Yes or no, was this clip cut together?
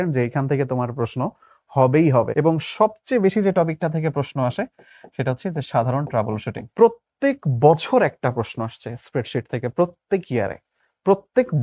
yes